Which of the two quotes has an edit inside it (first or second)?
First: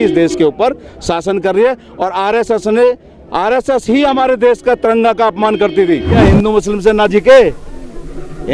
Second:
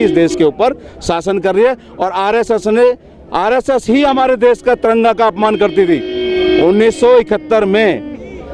first